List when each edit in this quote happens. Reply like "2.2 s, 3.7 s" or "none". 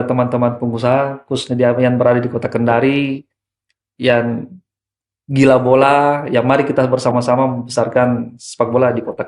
none

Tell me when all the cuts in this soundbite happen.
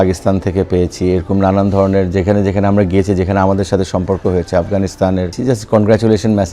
5.4 s

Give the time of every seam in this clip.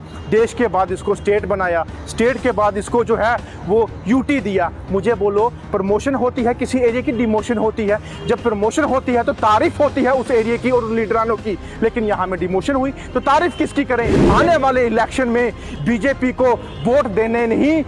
14.2 s

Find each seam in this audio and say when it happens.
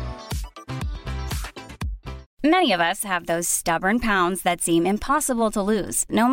2.2 s

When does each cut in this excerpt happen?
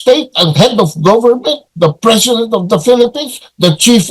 none

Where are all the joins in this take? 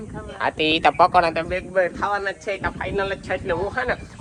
none

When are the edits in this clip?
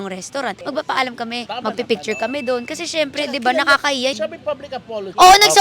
4.2 s

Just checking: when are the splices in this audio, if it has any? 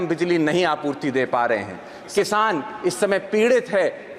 2.1 s

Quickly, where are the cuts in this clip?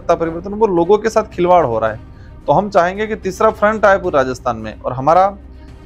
none

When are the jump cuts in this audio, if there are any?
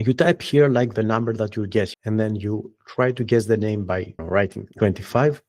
2.0 s, 4.2 s

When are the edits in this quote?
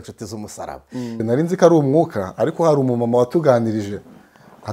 1.2 s

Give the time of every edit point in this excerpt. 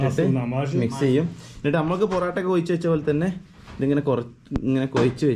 none

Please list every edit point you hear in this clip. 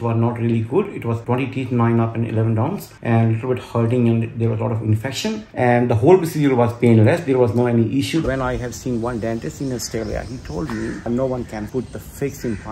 5.4 s, 8.3 s

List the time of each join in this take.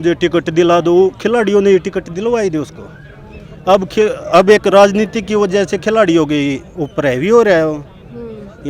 none

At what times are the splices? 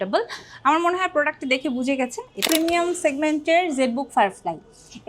2.4 s

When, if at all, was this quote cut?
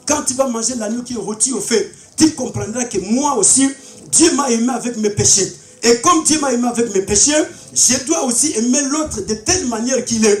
none

